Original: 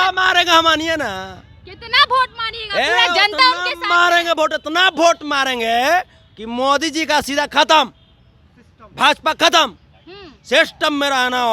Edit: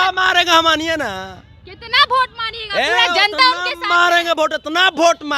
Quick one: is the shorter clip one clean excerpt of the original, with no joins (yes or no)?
yes